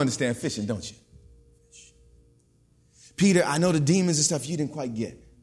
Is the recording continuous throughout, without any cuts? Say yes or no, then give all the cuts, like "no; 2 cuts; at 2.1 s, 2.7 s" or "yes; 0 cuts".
no; 1 cut; at 1.8 s